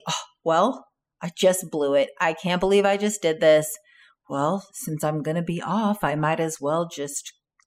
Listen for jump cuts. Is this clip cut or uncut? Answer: uncut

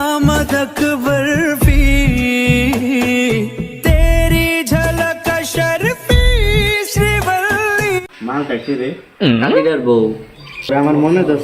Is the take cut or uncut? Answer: cut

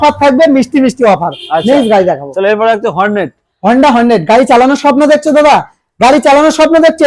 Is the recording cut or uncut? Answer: uncut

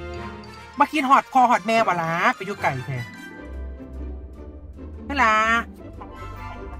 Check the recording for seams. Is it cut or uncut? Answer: cut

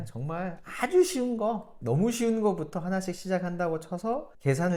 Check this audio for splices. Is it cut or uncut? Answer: uncut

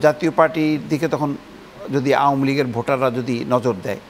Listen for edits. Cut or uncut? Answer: uncut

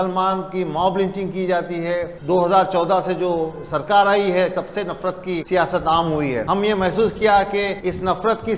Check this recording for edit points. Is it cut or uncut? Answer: cut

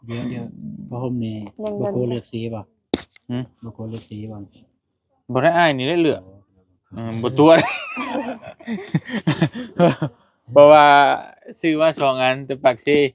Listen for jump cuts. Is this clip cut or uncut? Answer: uncut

